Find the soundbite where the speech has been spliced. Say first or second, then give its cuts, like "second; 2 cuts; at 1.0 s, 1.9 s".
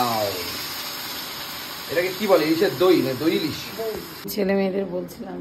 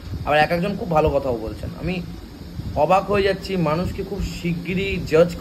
first; 1 cut; at 4.3 s